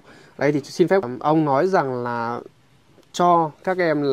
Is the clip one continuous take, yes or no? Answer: no